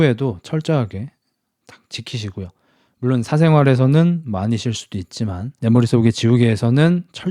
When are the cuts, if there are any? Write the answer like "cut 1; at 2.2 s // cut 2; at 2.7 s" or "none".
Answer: none